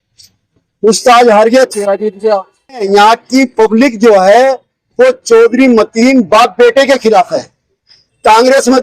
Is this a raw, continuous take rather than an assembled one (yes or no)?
no